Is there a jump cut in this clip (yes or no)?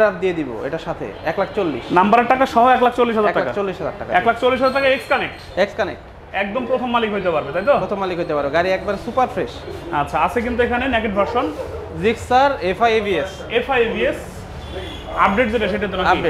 no